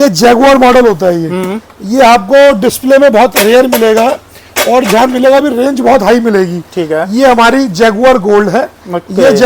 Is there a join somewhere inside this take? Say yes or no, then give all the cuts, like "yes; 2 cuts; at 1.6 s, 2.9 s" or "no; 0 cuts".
no; 0 cuts